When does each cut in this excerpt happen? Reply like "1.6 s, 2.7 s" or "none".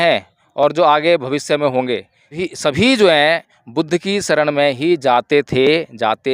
2.4 s